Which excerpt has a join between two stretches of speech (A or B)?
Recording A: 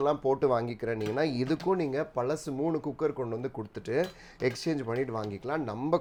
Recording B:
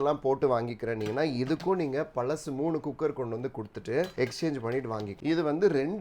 B